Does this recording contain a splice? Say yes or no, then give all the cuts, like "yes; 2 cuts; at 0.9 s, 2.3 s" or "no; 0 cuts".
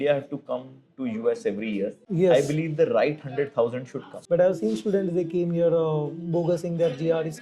yes; 2 cuts; at 2.0 s, 4.1 s